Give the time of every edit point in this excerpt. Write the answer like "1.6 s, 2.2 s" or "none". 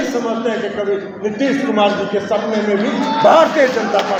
none